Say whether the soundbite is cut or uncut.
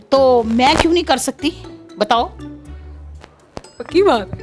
uncut